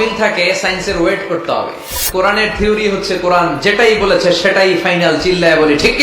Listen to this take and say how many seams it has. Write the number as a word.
one